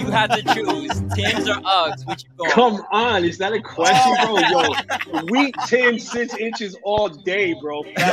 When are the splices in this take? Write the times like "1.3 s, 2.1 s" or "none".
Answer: none